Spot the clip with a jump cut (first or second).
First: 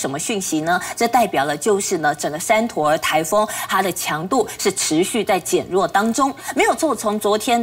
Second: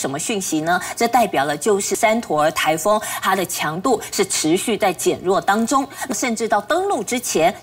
second